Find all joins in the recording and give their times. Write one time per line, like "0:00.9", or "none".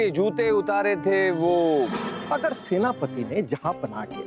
0:02.2